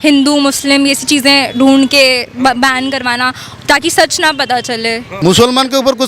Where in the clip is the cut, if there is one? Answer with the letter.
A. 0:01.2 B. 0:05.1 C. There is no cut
B